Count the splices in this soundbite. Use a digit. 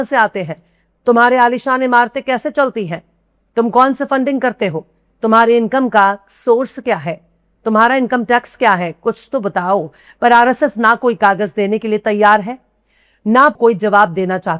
1